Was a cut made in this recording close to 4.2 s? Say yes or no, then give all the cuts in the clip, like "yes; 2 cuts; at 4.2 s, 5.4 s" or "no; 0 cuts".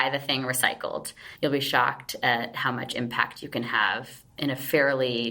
no; 1 cut; at 1.2 s